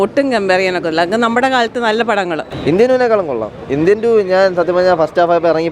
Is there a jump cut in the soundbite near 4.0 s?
no; 1 cut; at 2.5 s

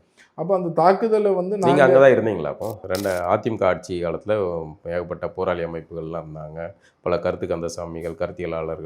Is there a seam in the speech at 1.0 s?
no; 1 cut; at 2.8 s

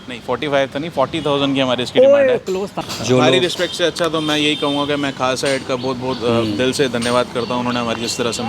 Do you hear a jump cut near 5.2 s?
no; 1 cut; at 2.8 s

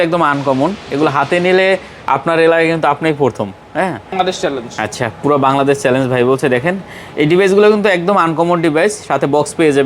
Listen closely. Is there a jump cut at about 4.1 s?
yes; 1 cut; at 4.1 s

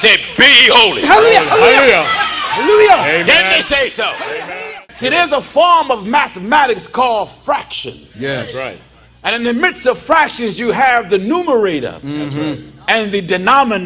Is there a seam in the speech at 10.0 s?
no; 1 cut; at 4.7 s

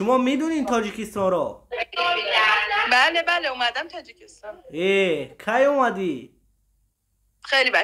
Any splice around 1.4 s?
no; 0 cuts

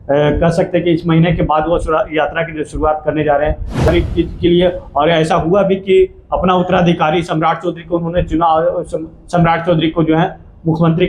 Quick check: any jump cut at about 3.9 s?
yes; 1 cut; at 3.9 s

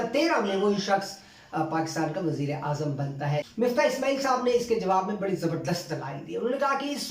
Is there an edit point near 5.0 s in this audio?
no; 1 cut; at 3.5 s

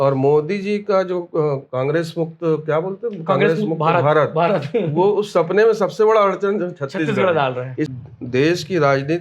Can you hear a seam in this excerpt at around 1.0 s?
no; 1 cut; at 7.9 s

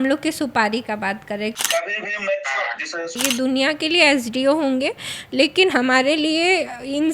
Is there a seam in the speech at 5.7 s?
no; 2 cuts; at 1.5 s, 3.2 s

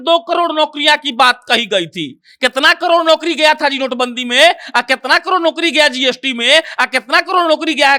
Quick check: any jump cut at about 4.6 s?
no; 0 cuts

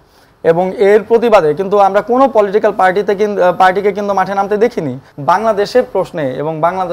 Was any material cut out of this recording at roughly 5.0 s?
yes; 1 cut; at 5.0 s

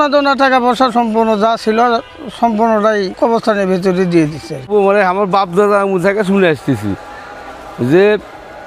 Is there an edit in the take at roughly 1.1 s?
no; 2 cuts; at 3.1 s, 4.7 s

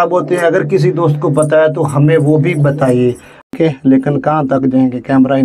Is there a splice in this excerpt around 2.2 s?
no; 1 cut; at 3.5 s

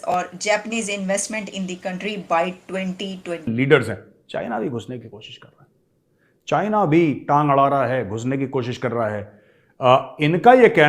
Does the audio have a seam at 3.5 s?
yes; 1 cut; at 3.5 s

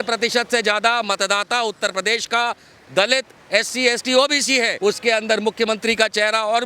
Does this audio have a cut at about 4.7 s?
yes; 1 cut; at 4.7 s

